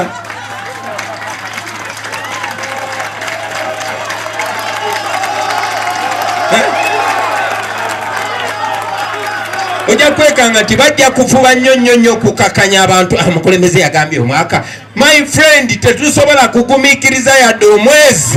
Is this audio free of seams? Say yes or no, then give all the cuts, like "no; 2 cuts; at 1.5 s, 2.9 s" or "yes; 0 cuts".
yes; 0 cuts